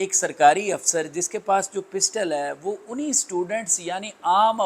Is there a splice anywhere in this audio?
no; 0 cuts

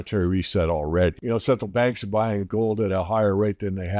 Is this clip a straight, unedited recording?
no; 1 cut; at 1.2 s

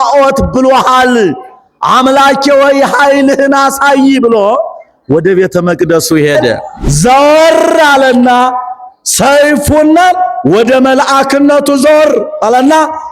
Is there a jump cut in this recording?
yes; 1 cut; at 6.8 s

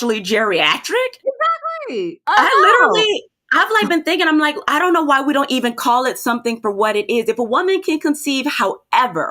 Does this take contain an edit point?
yes; 1 cut; at 2.2 s

